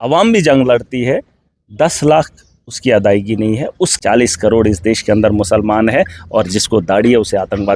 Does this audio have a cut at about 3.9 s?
yes; 1 cut; at 3.9 s

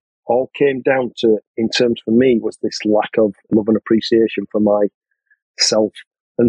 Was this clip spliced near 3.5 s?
yes; 1 cut; at 3.5 s

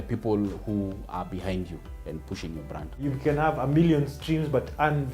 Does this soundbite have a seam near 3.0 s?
yes; 1 cut; at 3.0 s

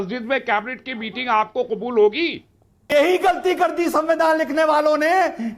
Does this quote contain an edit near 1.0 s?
no; 1 cut; at 2.8 s

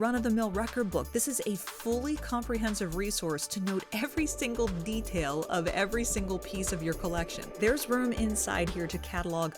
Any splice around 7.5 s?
yes; 1 cut; at 7.5 s

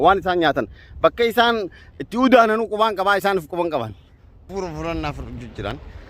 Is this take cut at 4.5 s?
yes; 1 cut; at 4.5 s

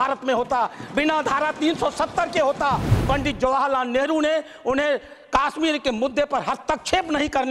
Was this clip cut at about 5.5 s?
no; 1 cut; at 2.9 s

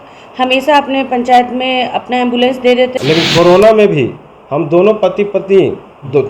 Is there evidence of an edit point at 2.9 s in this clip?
yes; 1 cut; at 2.9 s

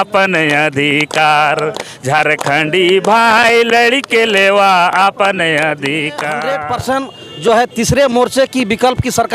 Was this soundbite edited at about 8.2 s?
no; 1 cut; at 6.5 s

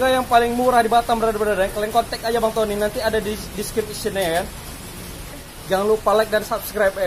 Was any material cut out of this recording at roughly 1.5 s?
no; 1 cut; at 5.5 s

